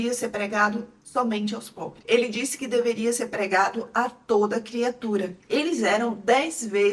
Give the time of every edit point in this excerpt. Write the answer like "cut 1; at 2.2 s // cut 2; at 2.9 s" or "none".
cut 1; at 5.4 s